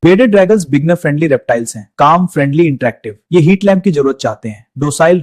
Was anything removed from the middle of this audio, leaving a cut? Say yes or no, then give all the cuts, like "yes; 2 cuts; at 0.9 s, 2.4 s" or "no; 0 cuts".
no; 0 cuts